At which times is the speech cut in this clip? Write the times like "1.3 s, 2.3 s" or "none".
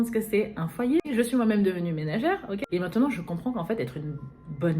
1.1 s, 2.6 s